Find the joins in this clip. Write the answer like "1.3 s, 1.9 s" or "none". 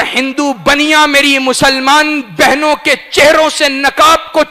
none